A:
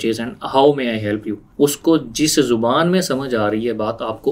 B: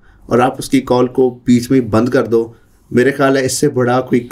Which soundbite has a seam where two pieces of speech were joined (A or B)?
A